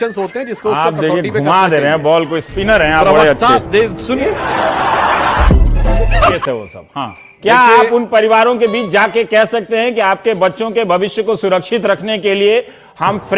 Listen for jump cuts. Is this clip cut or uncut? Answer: cut